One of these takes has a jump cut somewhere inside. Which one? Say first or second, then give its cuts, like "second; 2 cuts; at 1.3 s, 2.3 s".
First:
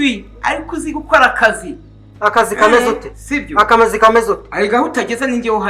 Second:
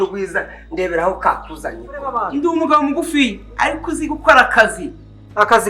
second; 1 cut; at 2.2 s